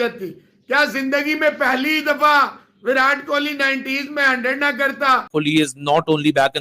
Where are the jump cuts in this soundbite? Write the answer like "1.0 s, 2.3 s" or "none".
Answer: 5.3 s